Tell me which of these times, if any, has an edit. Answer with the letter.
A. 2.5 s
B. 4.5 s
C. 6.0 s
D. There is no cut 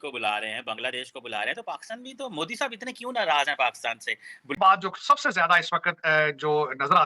B